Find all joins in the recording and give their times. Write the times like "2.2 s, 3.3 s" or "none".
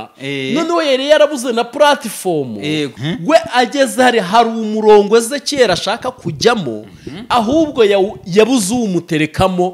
3.0 s